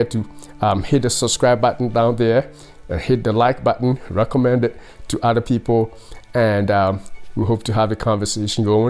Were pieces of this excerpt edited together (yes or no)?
no